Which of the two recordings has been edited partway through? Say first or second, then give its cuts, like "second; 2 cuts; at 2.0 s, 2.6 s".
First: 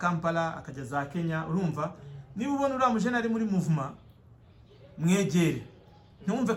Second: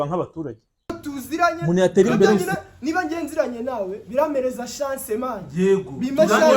second; 1 cut; at 2.4 s